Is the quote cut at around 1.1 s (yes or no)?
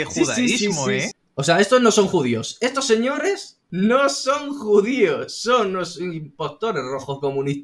yes